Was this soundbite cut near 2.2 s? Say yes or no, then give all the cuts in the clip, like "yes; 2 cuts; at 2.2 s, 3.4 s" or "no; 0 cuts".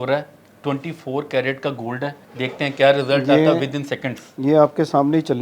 yes; 1 cut; at 2.2 s